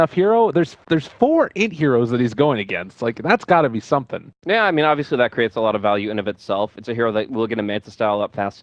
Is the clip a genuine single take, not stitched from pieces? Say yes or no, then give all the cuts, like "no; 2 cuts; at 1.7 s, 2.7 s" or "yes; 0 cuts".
yes; 0 cuts